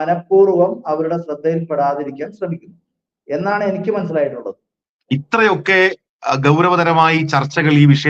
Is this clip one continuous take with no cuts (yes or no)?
yes